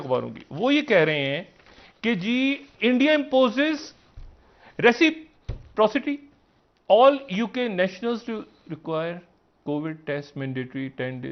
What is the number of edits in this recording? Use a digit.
0